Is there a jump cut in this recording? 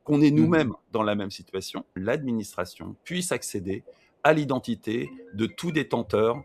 yes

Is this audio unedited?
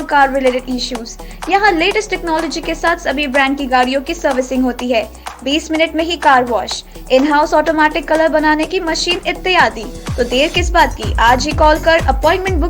yes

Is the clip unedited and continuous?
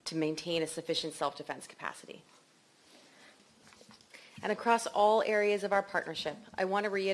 no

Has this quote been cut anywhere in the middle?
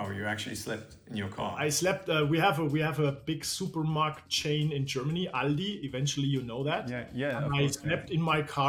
no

